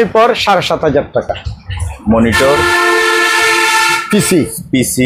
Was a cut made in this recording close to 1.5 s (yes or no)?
no